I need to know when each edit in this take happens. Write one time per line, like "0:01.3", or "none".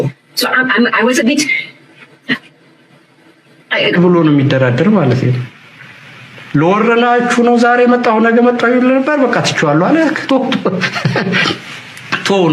0:03.9

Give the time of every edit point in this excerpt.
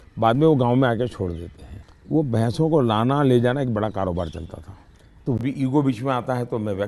0:05.4

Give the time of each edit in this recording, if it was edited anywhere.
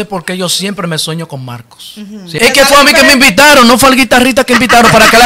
0:02.3

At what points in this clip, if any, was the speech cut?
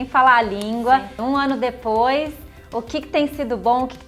0:01.1

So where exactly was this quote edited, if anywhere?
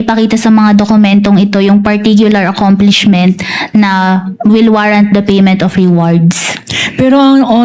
none

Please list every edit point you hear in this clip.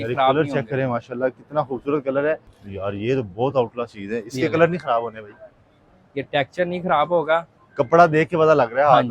0:02.5

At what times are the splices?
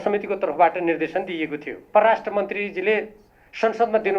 0:01.8

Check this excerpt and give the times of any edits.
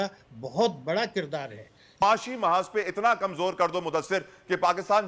0:01.9

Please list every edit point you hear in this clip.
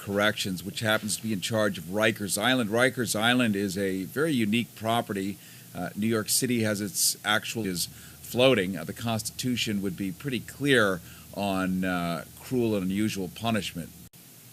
none

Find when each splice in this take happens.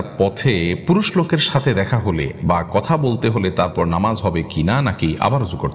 none

